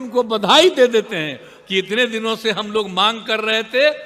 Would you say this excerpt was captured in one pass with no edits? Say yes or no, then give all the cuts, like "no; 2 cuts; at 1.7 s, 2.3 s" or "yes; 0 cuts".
yes; 0 cuts